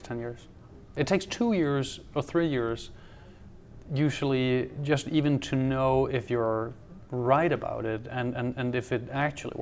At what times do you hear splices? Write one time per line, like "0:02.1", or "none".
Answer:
0:01.0